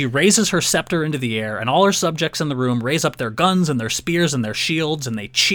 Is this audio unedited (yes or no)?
yes